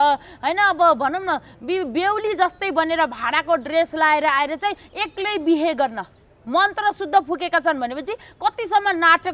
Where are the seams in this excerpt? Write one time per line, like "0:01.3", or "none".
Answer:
none

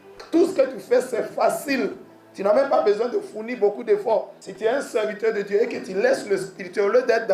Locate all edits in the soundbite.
0:04.4

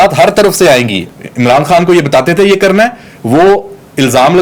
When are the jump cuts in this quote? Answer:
0:01.0

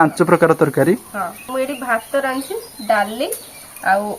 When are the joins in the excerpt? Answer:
0:01.4

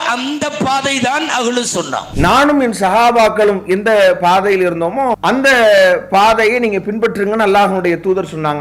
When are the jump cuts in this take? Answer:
0:02.1
0:05.2

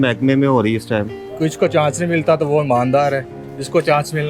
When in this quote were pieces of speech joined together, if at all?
0:01.2

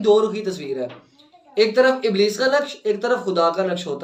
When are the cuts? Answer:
none

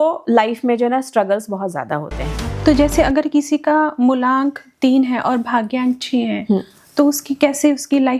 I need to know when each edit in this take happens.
0:02.4

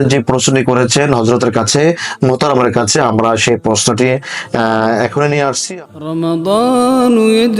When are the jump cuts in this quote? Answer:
0:05.6

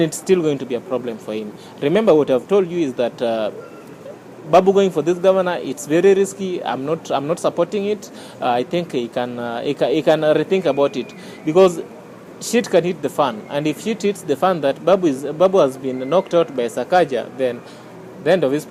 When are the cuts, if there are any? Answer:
none

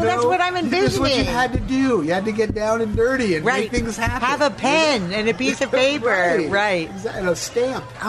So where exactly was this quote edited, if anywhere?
none

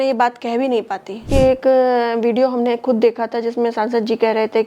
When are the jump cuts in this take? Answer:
0:01.3

